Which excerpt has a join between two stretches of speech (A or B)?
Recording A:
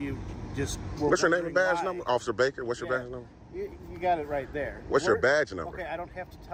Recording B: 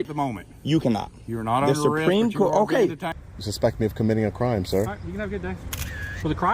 B